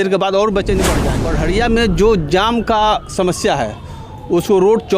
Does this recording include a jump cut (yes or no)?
yes